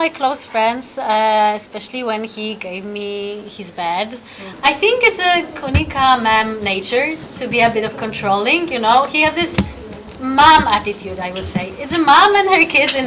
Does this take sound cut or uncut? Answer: cut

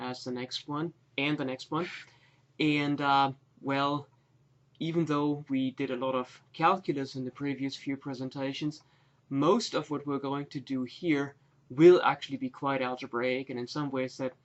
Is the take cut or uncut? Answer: uncut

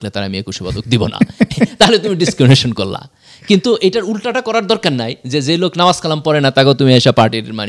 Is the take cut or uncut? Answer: uncut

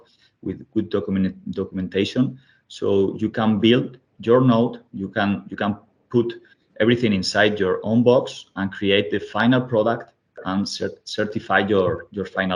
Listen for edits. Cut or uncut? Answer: uncut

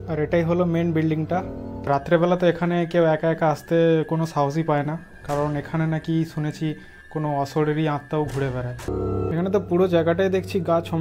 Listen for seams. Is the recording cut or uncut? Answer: cut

